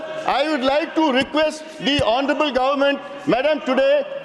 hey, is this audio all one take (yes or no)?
yes